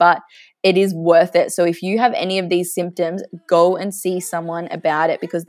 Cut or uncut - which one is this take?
uncut